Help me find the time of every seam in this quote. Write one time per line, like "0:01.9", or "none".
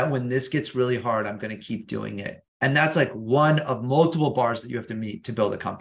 0:02.4